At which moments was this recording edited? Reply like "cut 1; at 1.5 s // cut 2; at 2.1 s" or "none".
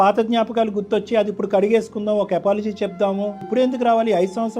cut 1; at 3.5 s